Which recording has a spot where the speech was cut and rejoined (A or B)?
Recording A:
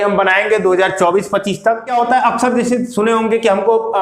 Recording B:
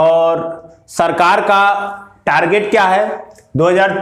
A